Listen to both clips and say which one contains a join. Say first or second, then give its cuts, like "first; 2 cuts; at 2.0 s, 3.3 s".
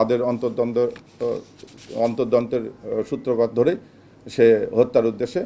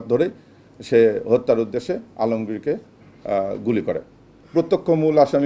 second; 1 cut; at 4.4 s